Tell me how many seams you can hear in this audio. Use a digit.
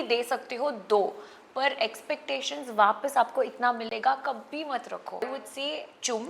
1